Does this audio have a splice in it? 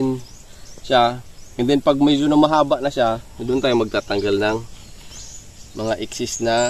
no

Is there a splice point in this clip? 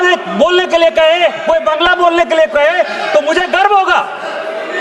no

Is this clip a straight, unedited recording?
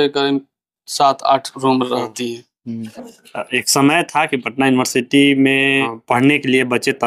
no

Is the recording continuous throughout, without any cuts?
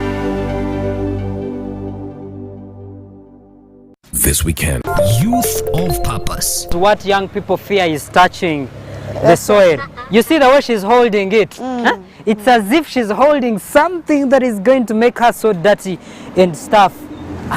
no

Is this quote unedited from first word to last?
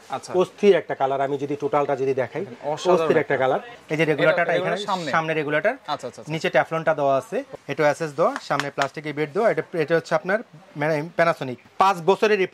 no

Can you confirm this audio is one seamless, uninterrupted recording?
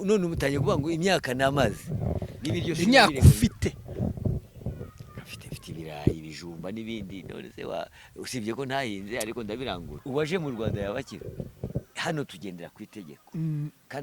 no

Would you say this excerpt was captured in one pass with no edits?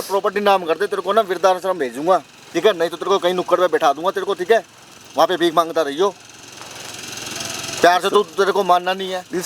yes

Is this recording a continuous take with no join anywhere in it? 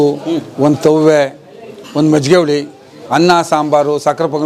yes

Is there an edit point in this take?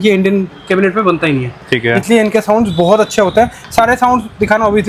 no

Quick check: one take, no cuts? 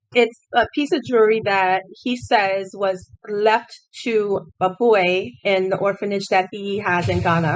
yes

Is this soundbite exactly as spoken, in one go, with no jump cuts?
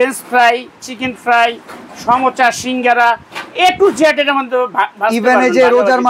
yes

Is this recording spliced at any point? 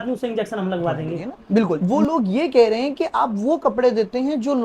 yes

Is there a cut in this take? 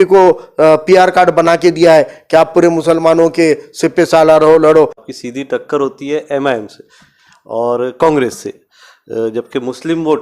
yes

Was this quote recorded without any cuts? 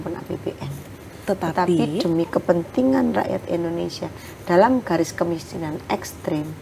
yes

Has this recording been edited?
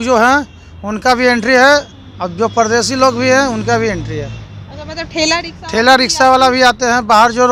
no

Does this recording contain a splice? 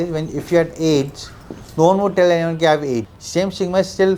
yes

